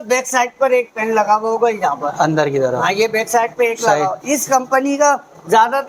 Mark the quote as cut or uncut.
uncut